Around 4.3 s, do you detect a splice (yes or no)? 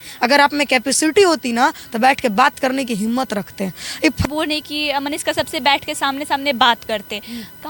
no